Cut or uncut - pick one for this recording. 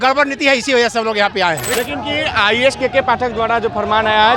cut